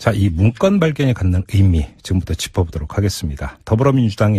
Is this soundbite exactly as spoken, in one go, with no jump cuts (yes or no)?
yes